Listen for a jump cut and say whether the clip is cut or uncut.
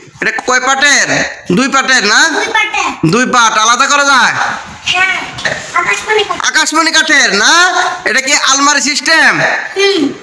cut